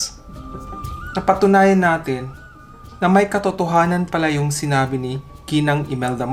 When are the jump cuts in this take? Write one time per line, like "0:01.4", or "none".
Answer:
none